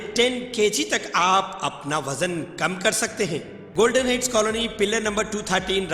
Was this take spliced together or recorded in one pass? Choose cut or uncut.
cut